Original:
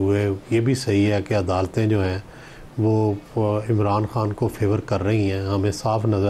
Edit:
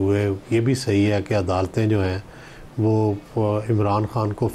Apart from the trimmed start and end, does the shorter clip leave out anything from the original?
no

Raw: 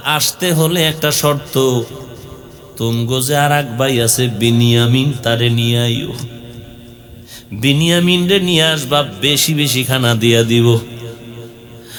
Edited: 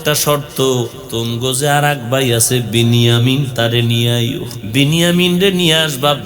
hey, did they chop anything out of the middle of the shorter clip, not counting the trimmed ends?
yes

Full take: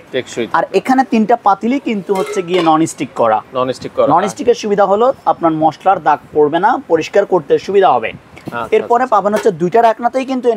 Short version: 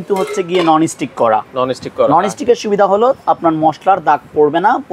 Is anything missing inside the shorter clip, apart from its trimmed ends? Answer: no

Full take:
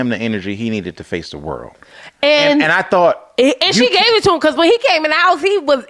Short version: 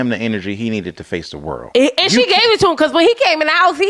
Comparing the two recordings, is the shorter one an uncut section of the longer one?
no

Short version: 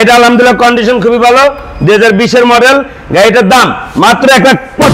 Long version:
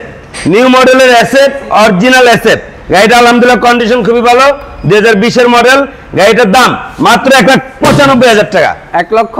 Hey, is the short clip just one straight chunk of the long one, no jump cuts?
yes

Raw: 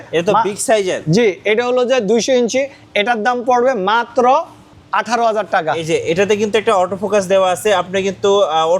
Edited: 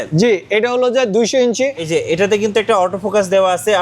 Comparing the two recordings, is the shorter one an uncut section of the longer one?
no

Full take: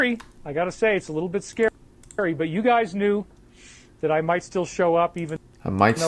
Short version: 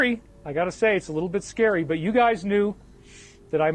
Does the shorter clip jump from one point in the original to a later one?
yes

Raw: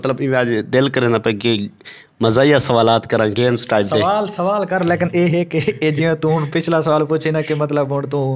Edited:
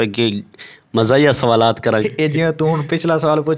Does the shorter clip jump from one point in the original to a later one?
yes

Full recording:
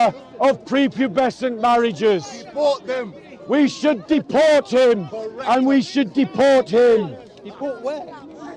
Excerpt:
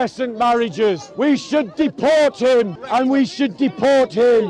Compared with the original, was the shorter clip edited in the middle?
yes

